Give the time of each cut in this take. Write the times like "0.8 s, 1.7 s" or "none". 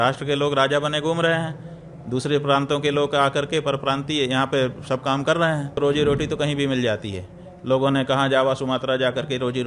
5.8 s